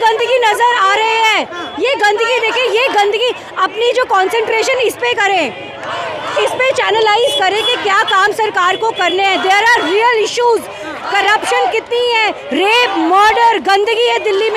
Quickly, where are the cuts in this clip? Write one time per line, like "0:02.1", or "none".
none